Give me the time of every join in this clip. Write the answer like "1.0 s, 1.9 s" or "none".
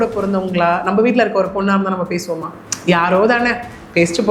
none